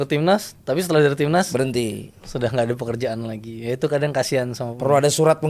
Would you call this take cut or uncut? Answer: uncut